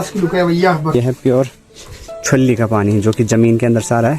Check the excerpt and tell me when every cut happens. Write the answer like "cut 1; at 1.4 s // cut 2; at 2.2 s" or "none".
cut 1; at 0.9 s